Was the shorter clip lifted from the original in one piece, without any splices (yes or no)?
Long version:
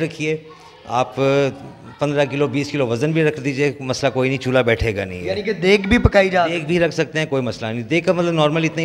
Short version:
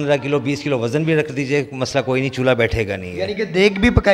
yes